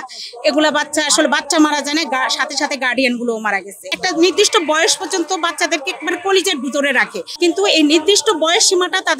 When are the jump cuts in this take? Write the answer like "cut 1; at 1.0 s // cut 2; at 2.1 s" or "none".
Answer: cut 1; at 3.9 s // cut 2; at 7.2 s

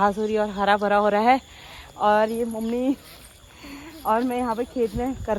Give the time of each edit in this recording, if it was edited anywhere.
none

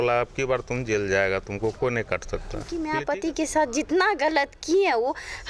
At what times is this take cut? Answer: cut 1; at 2.7 s

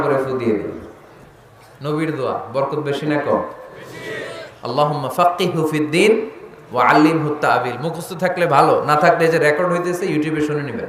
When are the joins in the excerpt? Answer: none

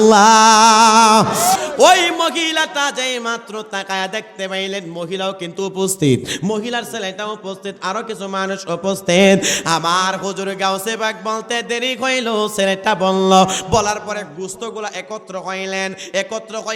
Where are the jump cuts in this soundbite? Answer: cut 1; at 1.6 s

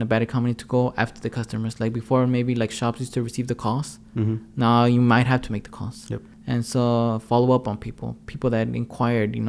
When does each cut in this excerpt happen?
none

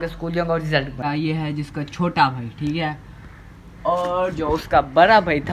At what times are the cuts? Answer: cut 1; at 0.9 s

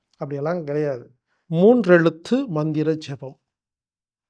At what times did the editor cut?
cut 1; at 1.4 s

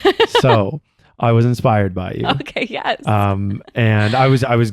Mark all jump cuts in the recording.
none

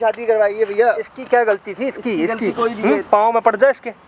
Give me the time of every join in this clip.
none

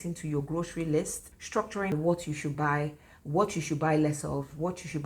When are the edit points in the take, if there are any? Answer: cut 1; at 1.4 s

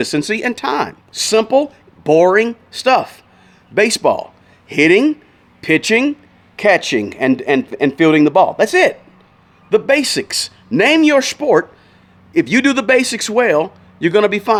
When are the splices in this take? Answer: none

